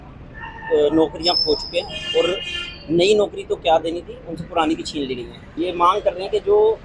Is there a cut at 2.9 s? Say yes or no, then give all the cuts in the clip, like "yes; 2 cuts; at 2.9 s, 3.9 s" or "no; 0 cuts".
no; 1 cut; at 5.6 s